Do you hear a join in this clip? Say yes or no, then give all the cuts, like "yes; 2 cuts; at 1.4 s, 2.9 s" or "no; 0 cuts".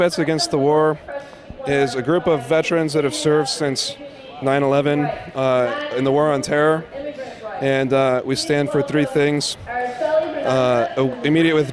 yes; 1 cut; at 6.0 s